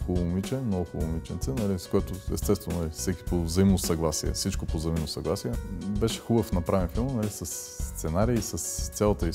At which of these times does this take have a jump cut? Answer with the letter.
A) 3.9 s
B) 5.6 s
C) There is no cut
B